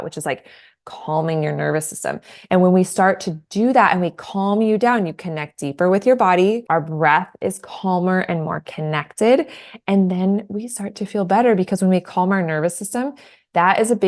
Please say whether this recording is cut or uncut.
cut